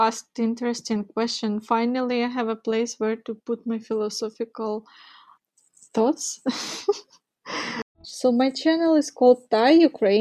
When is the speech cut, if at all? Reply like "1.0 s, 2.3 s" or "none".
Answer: 8.1 s